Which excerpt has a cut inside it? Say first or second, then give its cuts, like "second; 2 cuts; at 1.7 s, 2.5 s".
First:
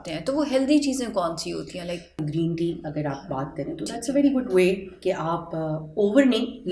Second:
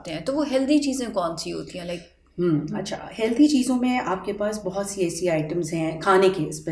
first; 1 cut; at 2.2 s